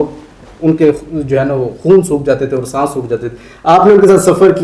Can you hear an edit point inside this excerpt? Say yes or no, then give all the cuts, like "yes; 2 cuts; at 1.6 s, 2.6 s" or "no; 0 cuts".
no; 0 cuts